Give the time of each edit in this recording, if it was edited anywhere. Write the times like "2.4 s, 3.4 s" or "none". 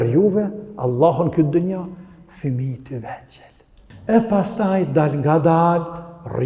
3.8 s